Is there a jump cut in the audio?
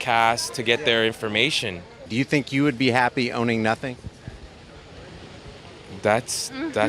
yes; 1 cut; at 2.0 s

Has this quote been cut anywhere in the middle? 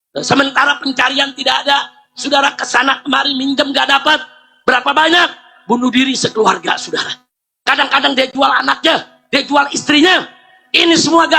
no; 0 cuts

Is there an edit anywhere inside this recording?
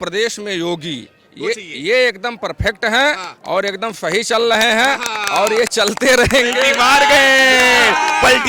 no; 0 cuts

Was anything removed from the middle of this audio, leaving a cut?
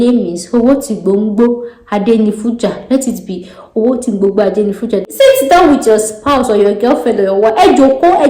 yes; 1 cut; at 5.0 s

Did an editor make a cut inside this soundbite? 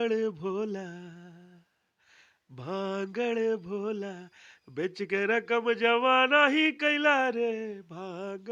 no; 0 cuts

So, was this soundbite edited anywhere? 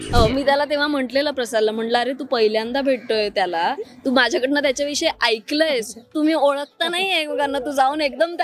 no; 0 cuts

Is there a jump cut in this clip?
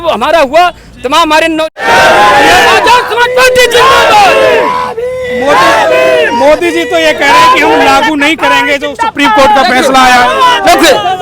yes; 1 cut; at 1.8 s

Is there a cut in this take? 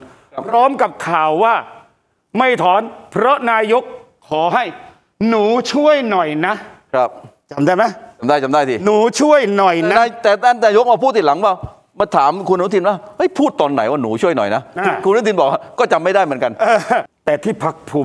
yes; 1 cut; at 17.1 s

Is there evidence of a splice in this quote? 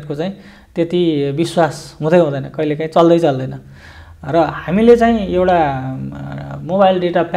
no; 0 cuts

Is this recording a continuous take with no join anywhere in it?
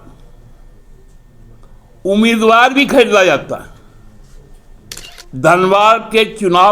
no; 1 cut; at 5.1 s

